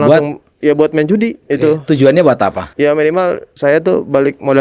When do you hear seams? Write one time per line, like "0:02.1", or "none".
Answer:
0:01.4
0:02.6
0:03.5